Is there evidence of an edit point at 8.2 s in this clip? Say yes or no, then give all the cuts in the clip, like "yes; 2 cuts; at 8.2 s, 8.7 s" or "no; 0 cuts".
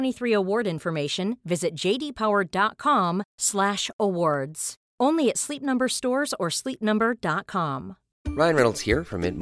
no; 0 cuts